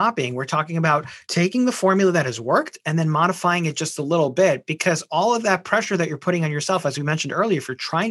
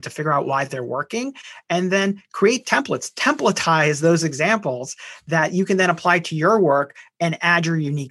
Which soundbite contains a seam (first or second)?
first